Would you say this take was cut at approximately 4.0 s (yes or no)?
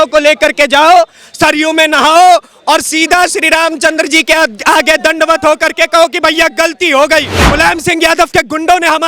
no